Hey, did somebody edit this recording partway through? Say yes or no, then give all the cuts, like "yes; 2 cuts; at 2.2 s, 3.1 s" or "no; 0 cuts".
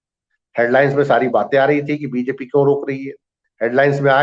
no; 0 cuts